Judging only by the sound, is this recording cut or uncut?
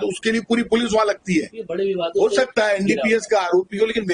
cut